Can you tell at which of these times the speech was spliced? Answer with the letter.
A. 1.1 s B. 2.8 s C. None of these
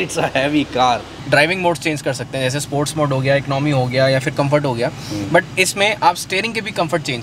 A